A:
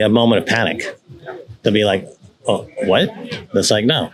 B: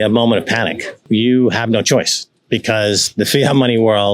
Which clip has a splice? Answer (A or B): B